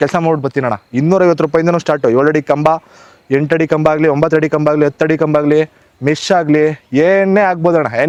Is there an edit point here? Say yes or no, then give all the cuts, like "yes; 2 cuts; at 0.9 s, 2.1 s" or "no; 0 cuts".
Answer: no; 0 cuts